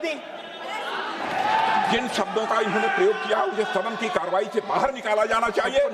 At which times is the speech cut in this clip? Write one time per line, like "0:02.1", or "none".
0:01.2